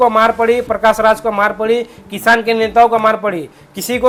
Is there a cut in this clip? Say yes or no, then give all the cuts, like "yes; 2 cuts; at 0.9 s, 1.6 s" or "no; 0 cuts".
no; 0 cuts